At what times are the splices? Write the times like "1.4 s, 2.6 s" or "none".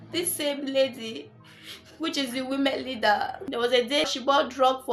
3.8 s